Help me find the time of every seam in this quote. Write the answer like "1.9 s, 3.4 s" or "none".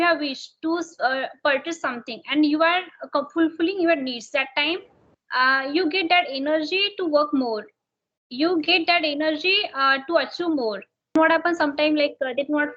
11.1 s